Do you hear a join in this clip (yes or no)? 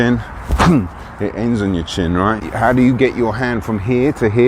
yes